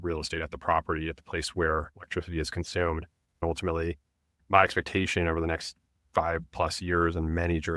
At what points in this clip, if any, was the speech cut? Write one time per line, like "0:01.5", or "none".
0:03.4